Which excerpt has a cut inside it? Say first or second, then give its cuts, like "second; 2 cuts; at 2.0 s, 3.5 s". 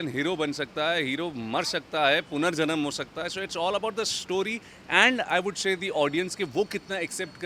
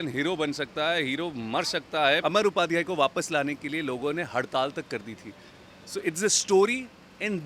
second; 1 cut; at 2.2 s